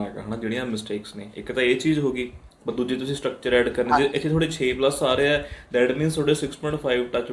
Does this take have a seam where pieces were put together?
no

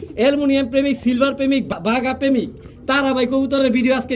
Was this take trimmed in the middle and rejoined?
yes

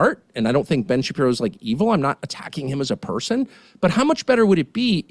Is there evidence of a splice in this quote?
no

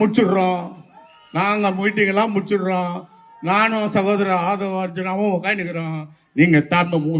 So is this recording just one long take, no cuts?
yes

